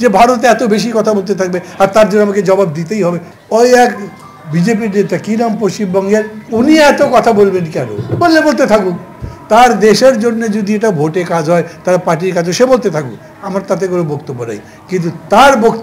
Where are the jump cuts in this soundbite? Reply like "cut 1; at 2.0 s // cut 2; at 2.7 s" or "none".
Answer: cut 1; at 3.3 s // cut 2; at 6.4 s